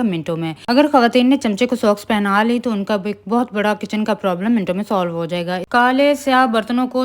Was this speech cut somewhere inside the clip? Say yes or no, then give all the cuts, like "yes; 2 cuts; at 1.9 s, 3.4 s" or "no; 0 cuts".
yes; 1 cut; at 5.6 s